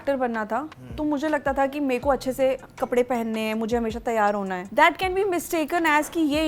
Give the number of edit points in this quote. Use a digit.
0